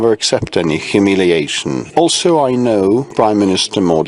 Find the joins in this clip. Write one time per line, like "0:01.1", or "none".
0:01.8
0:03.1